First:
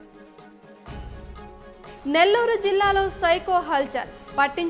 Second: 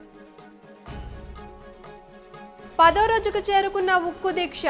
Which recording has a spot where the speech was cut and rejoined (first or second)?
first